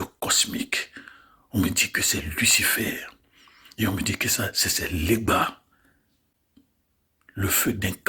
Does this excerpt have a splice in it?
yes; 1 cut; at 6.4 s

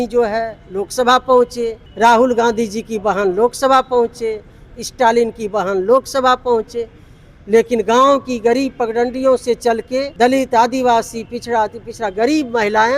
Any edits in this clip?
yes; 2 cuts; at 1.8 s, 10.1 s

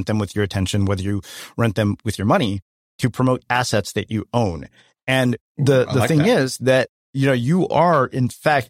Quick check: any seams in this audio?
no; 0 cuts

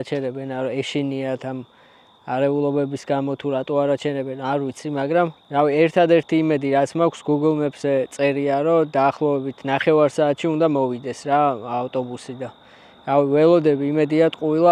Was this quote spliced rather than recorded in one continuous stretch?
no; 0 cuts

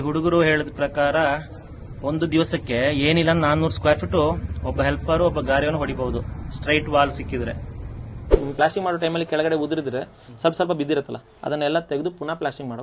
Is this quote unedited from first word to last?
no; 1 cut; at 8.3 s

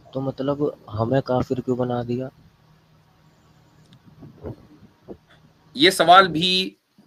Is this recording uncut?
yes; 0 cuts

